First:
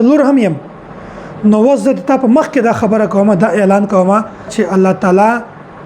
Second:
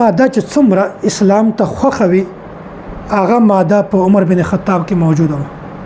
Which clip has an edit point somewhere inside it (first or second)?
first